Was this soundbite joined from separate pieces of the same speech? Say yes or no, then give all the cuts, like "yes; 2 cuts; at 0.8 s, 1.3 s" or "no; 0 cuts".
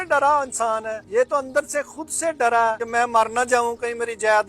yes; 2 cuts; at 1.0 s, 2.8 s